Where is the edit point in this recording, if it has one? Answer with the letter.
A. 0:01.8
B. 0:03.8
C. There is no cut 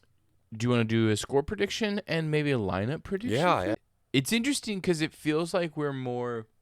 B